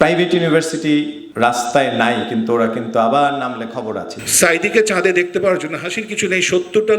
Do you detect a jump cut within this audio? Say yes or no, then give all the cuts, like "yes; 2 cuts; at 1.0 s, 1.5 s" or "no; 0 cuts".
yes; 2 cuts; at 1.2 s, 4.2 s